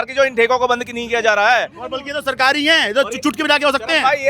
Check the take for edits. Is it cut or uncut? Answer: uncut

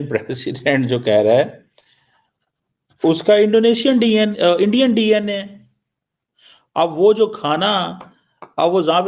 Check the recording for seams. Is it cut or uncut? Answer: uncut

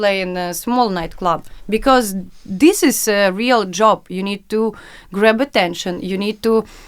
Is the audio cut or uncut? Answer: uncut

